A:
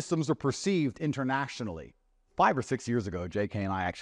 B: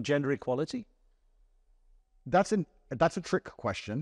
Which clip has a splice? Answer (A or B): A